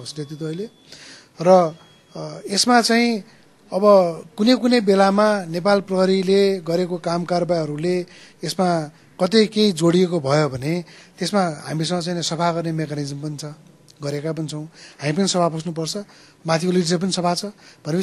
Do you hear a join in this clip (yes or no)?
no